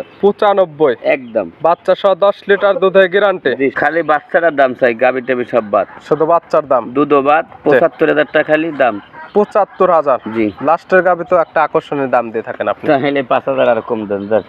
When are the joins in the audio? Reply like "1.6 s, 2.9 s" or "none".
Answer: 3.8 s